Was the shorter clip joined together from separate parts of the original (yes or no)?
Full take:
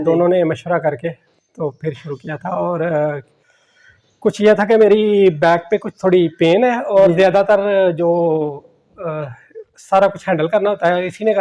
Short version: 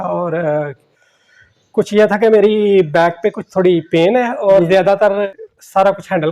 yes